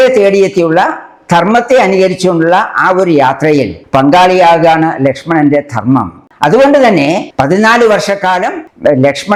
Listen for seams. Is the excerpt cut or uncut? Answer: uncut